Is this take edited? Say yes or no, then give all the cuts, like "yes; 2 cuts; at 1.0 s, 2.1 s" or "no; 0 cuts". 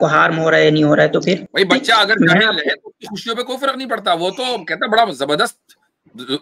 yes; 1 cut; at 1.5 s